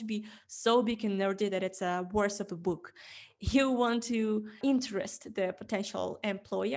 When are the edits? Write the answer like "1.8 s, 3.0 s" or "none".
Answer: 4.6 s